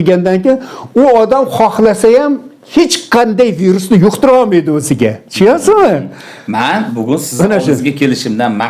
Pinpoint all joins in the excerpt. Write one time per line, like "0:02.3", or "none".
none